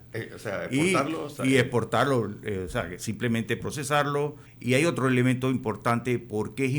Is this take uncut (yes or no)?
no